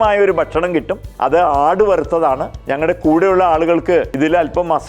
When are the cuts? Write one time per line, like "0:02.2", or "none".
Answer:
0:01.0
0:02.5
0:04.1